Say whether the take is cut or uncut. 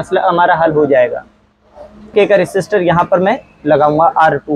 cut